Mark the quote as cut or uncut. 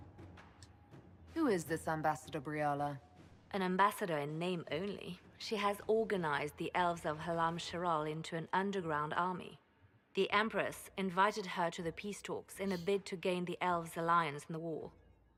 uncut